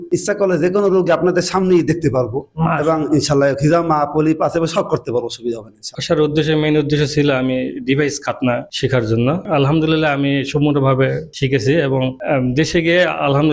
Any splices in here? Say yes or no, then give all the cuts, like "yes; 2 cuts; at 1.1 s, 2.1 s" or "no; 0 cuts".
yes; 2 cuts; at 5.9 s, 9.4 s